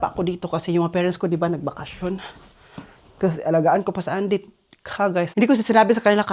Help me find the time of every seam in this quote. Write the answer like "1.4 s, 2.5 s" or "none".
5.3 s